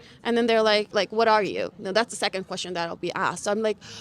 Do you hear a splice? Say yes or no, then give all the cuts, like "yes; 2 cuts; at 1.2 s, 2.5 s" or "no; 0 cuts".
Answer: yes; 1 cut; at 0.9 s